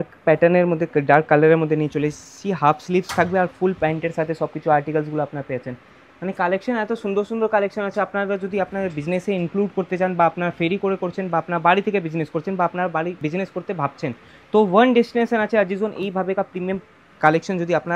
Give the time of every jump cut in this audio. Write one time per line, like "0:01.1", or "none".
none